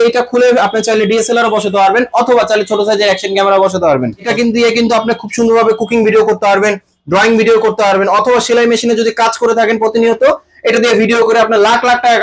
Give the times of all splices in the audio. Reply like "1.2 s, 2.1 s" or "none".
4.2 s